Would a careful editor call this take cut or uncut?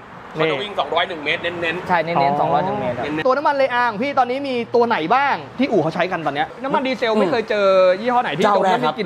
cut